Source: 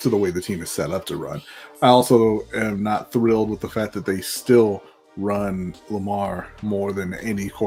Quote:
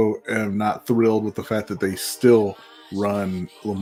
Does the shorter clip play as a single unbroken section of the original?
yes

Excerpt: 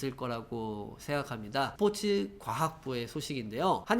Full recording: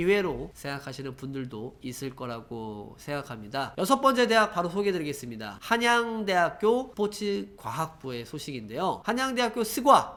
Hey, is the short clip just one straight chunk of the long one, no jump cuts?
no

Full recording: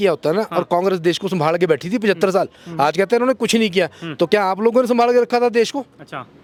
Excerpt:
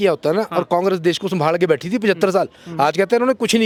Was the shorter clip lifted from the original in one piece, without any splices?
yes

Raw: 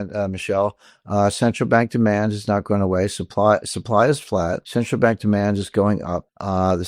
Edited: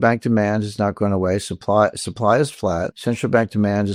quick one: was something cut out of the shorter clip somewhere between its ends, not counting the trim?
no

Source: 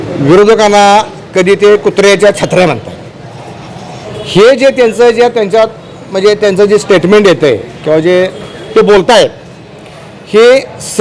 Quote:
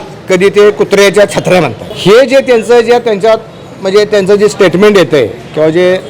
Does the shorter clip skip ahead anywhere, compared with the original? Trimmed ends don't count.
yes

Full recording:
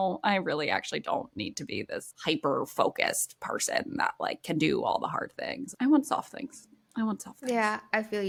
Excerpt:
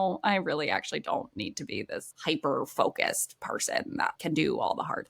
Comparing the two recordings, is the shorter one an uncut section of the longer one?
no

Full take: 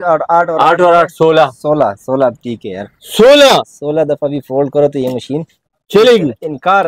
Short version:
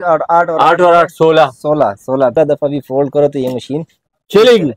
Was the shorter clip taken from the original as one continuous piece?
no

